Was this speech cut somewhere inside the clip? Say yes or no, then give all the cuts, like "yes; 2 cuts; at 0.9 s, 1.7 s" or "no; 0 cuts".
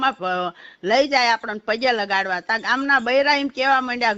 no; 0 cuts